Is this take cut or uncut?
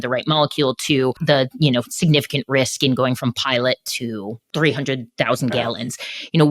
cut